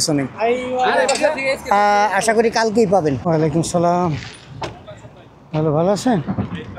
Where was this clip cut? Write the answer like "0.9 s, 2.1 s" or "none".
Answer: 3.2 s